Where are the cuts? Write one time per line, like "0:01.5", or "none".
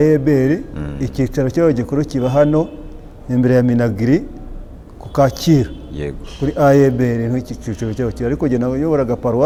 none